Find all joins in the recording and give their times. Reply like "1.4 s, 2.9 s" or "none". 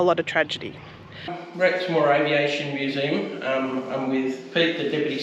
1.4 s